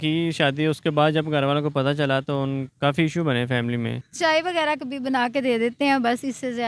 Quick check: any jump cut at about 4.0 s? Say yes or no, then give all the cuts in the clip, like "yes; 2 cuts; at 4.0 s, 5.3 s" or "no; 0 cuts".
yes; 1 cut; at 4.0 s